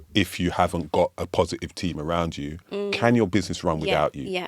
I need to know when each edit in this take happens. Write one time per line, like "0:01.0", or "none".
0:02.6